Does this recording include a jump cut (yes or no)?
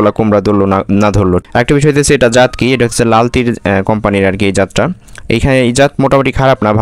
no